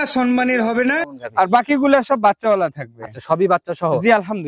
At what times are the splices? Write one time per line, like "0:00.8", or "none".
0:01.1